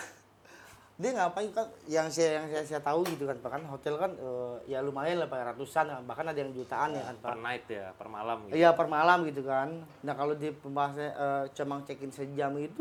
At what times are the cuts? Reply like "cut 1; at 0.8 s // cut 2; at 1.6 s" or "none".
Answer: none